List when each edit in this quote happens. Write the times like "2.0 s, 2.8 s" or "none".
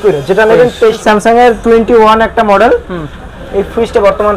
1.0 s